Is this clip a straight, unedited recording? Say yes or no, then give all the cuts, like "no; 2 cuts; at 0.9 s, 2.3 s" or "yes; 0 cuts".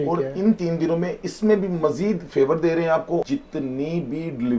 no; 1 cut; at 3.2 s